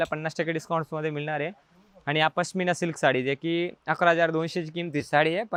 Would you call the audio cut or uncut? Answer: uncut